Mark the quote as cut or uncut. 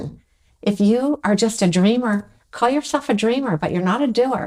uncut